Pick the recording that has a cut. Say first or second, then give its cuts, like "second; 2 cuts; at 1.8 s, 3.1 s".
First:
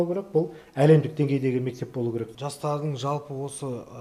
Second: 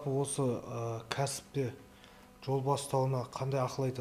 first; 1 cut; at 2.3 s